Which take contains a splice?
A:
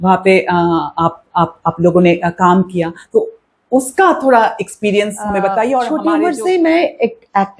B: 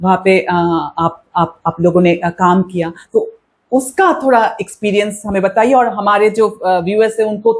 A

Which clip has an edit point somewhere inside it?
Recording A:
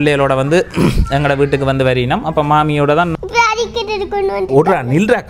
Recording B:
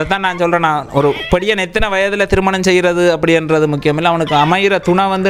A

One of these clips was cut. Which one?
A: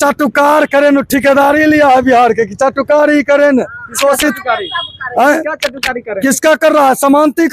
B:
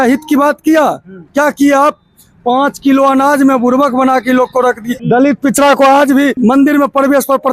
B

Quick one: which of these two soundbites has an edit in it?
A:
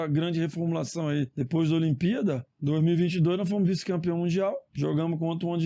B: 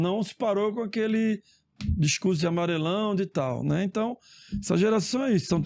A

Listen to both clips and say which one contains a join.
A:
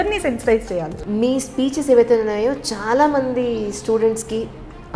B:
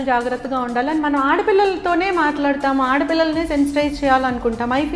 A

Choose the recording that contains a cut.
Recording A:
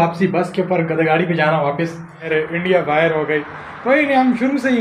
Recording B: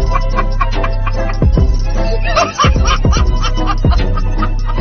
A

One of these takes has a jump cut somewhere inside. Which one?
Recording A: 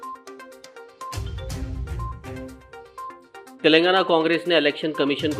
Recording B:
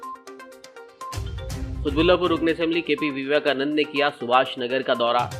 A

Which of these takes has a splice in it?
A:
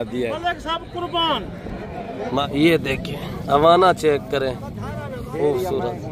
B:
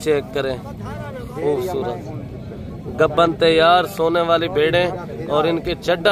A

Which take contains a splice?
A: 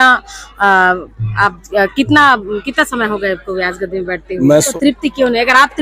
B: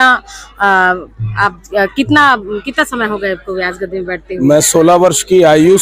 A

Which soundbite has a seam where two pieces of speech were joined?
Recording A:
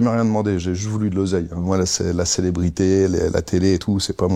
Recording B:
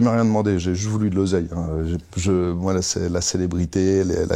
A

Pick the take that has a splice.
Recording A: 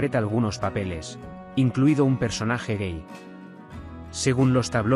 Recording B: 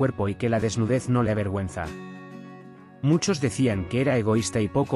A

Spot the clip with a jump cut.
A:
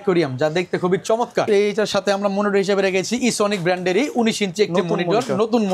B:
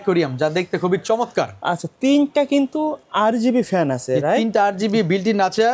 A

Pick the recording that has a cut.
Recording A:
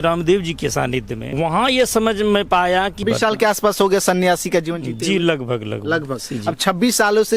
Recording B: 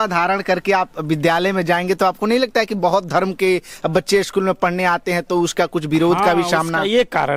A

